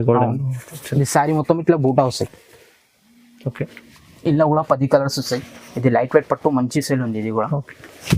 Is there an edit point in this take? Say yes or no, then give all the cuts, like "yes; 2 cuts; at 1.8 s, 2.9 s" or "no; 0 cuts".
no; 0 cuts